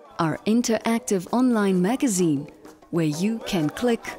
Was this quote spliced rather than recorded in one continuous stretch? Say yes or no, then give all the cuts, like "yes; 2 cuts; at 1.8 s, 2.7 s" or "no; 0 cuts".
no; 0 cuts